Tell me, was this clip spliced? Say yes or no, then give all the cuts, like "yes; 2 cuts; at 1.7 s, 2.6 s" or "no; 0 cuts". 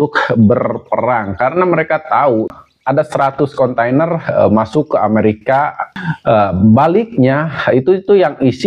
yes; 2 cuts; at 2.5 s, 5.9 s